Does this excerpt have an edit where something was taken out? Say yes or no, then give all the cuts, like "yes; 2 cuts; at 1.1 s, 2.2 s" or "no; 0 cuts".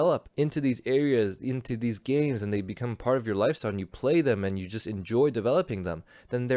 no; 0 cuts